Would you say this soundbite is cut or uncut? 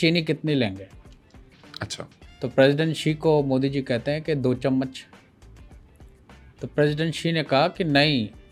uncut